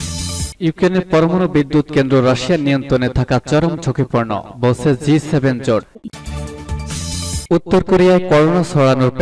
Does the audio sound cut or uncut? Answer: cut